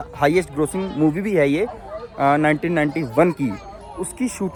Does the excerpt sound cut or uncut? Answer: uncut